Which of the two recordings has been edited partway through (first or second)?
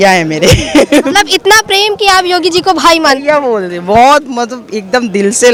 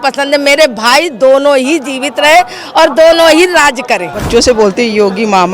second